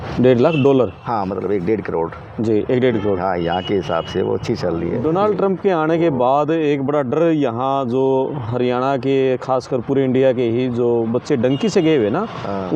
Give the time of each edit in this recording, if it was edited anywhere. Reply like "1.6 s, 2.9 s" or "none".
4.9 s

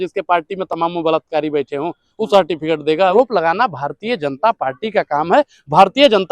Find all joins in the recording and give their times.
3.1 s

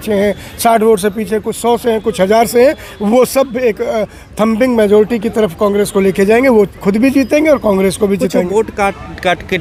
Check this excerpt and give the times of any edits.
none

